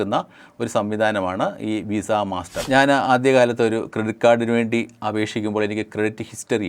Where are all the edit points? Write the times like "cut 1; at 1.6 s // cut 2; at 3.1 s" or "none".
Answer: cut 1; at 2.6 s